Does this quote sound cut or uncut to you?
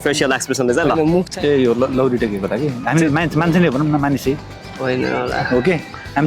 cut